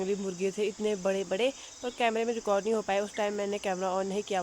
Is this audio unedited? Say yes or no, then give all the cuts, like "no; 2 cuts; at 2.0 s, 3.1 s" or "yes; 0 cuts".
yes; 0 cuts